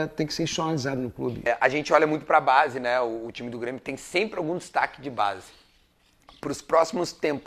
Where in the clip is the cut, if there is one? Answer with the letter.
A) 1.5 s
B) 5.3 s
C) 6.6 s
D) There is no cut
A